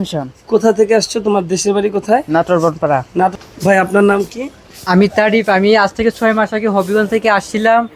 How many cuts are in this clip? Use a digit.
1